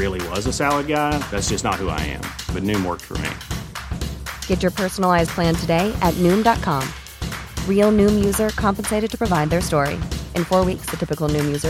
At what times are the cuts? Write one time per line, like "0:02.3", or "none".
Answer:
none